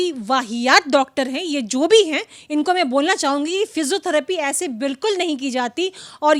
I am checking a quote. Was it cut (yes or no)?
no